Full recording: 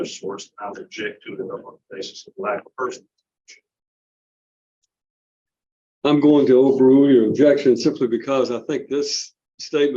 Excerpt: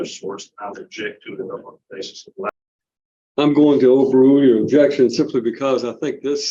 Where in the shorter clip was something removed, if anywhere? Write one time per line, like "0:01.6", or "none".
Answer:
0:02.5